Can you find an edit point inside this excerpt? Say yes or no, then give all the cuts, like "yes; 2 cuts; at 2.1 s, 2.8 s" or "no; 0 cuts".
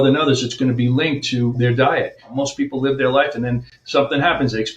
yes; 1 cut; at 2.3 s